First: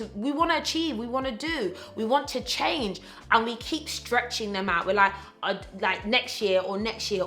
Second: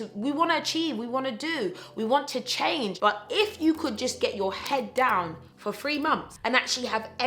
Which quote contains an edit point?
second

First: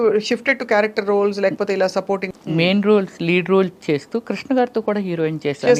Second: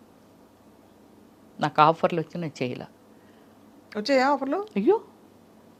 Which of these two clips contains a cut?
first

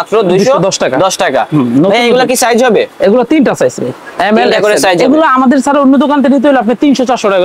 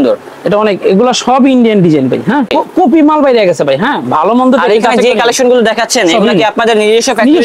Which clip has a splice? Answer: second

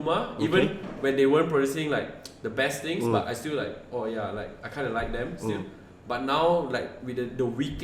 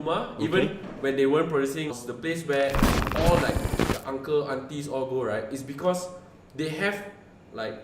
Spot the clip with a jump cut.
second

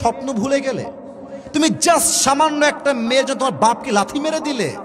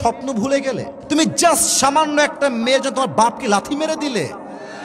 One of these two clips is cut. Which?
second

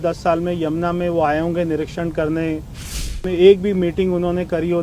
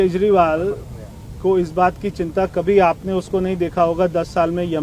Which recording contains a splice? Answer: first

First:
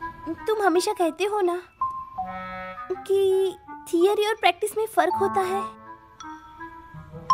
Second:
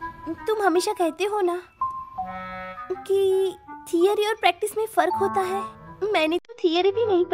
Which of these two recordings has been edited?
second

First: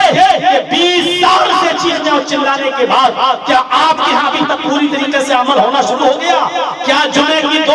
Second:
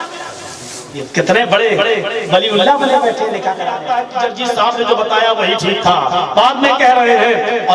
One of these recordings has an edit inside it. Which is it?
second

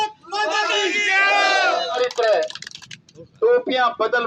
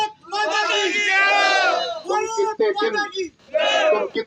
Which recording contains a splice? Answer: first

